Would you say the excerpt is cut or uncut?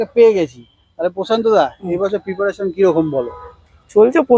uncut